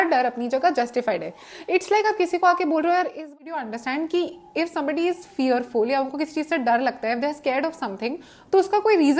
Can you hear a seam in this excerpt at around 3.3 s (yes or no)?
yes